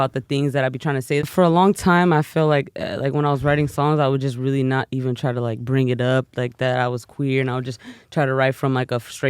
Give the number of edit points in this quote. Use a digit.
1